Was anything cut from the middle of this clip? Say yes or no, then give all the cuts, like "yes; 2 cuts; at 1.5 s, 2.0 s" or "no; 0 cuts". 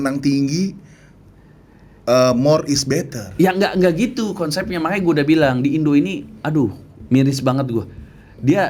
no; 0 cuts